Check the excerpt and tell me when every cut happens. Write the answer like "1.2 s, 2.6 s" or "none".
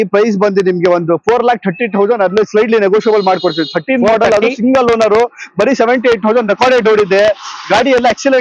none

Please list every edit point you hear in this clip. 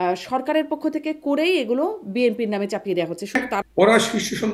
3.5 s

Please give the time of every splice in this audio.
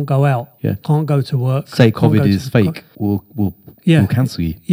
2.9 s

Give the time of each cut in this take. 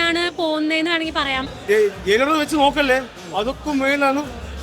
1.5 s

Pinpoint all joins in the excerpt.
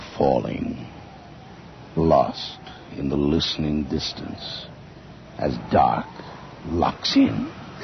none

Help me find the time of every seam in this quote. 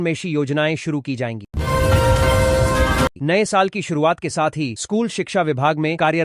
none

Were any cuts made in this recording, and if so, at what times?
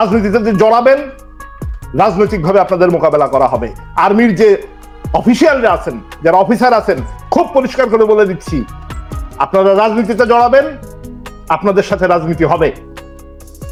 none

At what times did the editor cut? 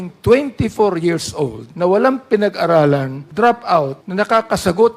1.6 s, 3.2 s, 4.0 s

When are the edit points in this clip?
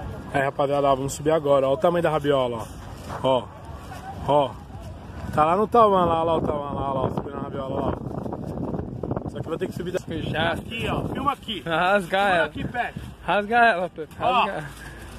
10.0 s

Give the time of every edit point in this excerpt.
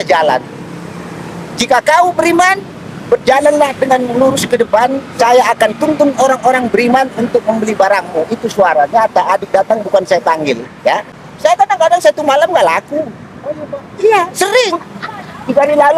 11.2 s

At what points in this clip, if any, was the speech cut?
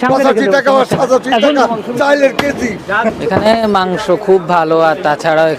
3.1 s

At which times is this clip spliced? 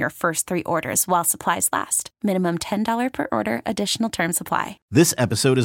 4.7 s

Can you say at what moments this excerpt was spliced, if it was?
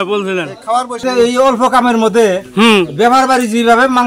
1.0 s

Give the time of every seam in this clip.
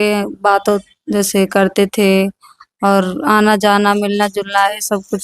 none

